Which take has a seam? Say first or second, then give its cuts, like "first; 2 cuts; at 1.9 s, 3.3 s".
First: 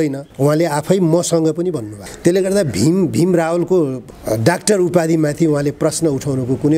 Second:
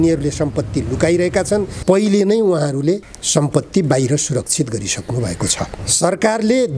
second; 2 cuts; at 1.7 s, 5.8 s